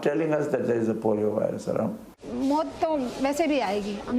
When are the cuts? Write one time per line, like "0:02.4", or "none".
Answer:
0:02.0

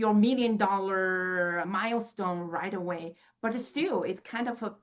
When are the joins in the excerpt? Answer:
none

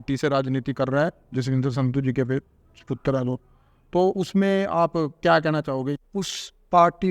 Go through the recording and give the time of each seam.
0:06.0

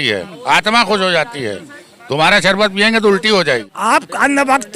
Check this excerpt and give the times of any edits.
0:03.7

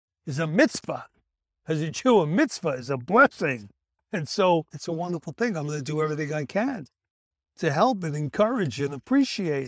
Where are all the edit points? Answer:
0:04.0

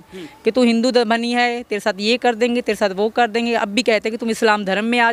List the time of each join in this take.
none

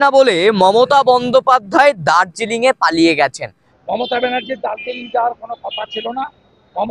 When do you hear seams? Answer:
0:03.6

